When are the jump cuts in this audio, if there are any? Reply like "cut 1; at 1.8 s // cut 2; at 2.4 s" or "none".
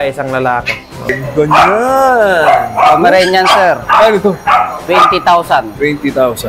cut 1; at 1.1 s